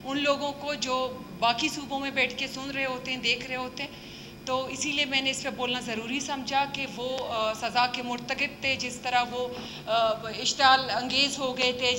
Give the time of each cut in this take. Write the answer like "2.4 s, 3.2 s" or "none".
none